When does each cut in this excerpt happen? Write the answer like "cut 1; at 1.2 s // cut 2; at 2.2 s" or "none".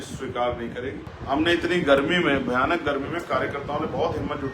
cut 1; at 1.0 s

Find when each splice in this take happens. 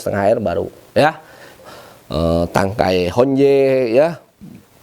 cut 1; at 1.6 s

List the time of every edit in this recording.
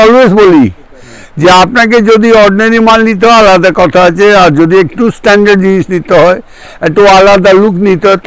none

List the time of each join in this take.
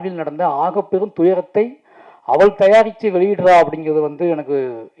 none

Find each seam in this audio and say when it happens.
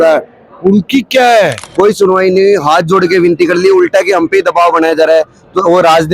cut 1; at 1.6 s

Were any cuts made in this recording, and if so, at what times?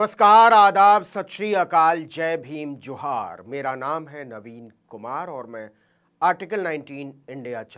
none

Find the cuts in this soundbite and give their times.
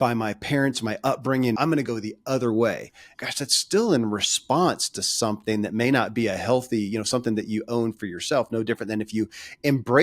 cut 1; at 1.6 s // cut 2; at 3.1 s

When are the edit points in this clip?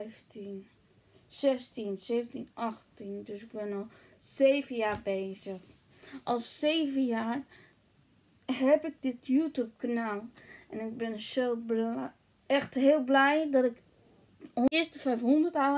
cut 1; at 14.7 s

